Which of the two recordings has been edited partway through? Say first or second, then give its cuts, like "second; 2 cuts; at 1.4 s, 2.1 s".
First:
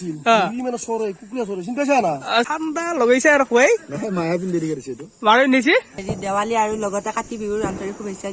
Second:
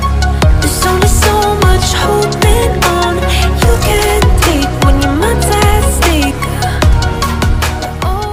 first; 2 cuts; at 2.5 s, 6.1 s